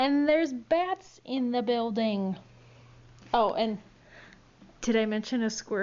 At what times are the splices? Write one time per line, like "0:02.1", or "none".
none